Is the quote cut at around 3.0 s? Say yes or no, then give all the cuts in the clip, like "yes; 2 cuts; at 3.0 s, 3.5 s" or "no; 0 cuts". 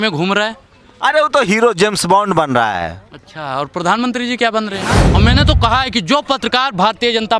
no; 1 cut; at 5.0 s